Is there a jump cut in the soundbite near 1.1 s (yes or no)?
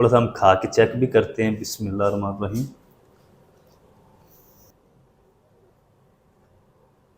no